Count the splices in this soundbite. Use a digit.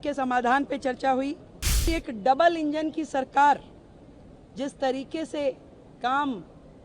1